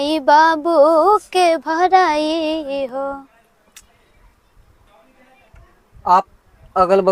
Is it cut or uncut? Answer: uncut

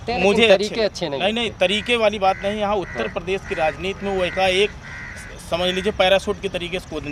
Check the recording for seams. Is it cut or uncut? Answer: uncut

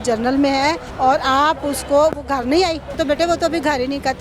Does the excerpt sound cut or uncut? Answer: cut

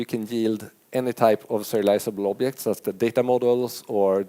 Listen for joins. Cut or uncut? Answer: uncut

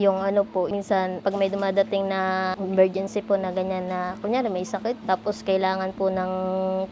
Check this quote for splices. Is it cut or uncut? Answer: uncut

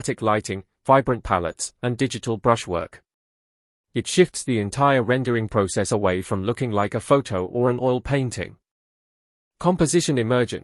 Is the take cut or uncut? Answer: uncut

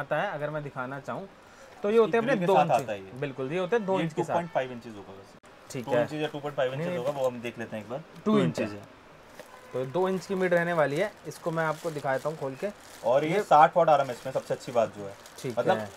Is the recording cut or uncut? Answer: uncut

